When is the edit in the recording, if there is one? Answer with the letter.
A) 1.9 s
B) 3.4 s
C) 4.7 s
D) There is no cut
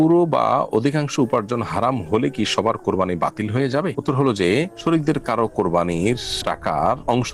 D